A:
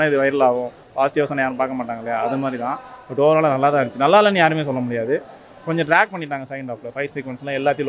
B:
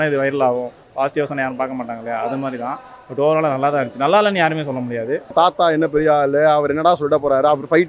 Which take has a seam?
B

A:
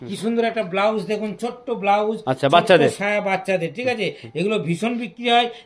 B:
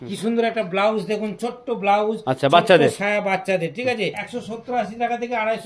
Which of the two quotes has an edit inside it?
B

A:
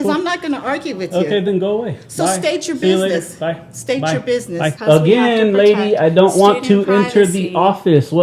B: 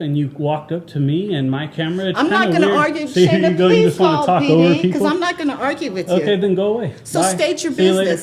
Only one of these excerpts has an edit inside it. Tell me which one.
A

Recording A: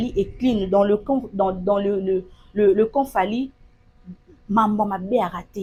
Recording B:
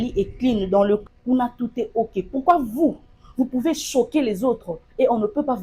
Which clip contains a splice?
B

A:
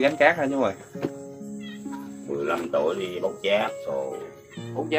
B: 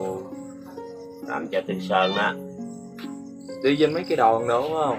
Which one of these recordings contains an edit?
A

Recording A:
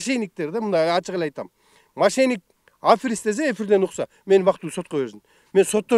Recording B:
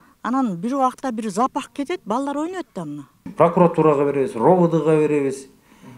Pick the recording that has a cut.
B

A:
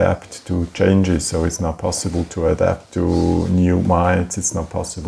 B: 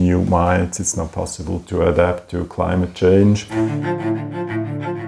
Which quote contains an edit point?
B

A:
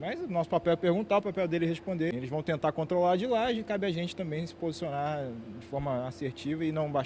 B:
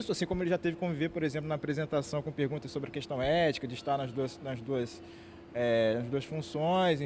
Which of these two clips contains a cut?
A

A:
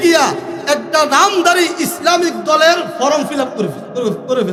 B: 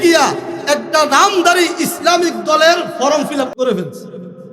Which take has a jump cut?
B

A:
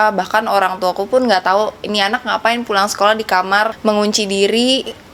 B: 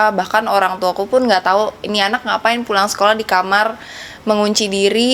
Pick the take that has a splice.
A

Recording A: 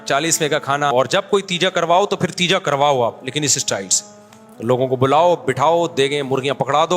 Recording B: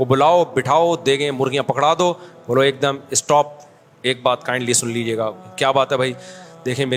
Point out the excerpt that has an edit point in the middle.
A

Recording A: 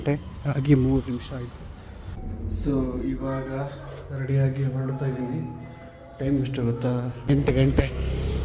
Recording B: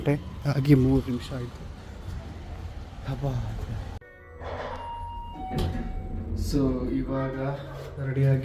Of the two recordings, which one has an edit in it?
A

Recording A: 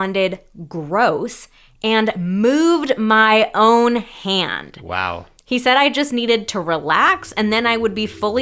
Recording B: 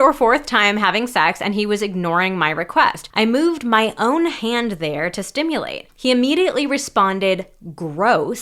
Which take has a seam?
B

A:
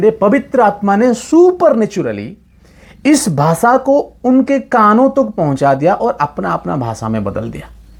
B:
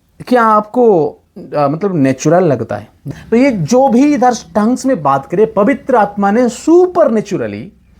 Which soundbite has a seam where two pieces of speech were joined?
B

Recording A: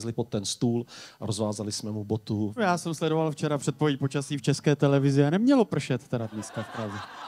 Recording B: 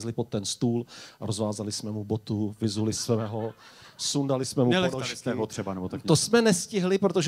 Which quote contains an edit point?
A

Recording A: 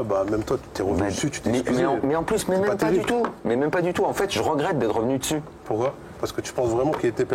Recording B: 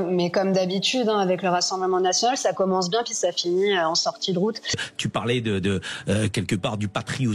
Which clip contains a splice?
B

